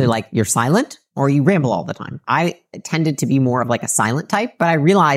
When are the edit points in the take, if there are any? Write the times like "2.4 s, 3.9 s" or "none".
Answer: 2.1 s